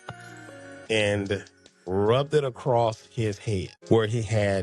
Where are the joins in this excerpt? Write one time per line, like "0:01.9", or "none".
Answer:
0:03.7